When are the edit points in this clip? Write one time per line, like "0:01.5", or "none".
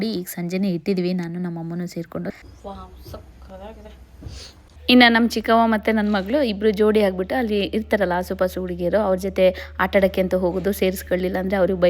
0:02.4
0:04.7